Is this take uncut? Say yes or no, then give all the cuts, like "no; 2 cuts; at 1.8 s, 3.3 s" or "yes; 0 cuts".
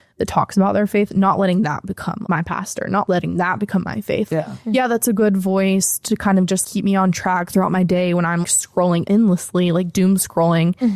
no; 5 cuts; at 2.2 s, 3.0 s, 4.3 s, 6.6 s, 8.8 s